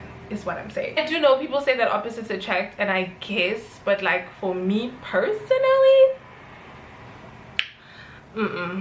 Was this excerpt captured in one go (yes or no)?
no